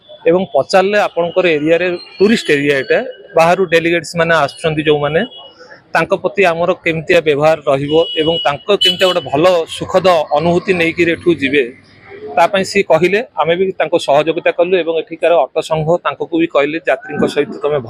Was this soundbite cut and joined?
no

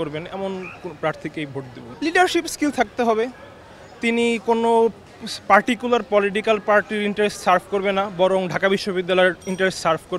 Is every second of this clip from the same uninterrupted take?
yes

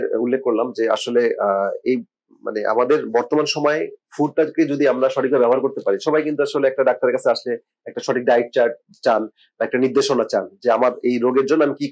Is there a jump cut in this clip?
no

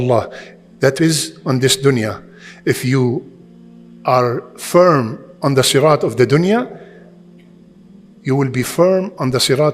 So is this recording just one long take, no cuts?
yes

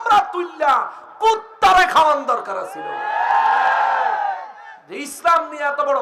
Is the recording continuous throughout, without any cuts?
yes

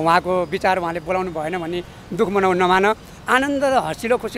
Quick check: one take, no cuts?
yes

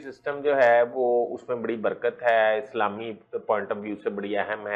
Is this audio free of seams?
yes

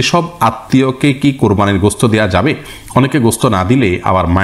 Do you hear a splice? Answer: no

